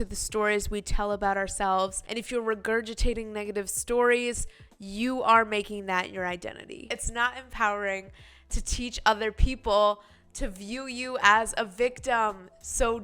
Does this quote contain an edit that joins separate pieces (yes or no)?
yes